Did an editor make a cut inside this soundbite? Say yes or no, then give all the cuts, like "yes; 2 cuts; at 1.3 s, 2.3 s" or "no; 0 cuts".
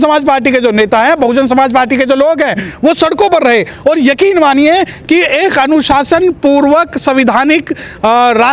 no; 0 cuts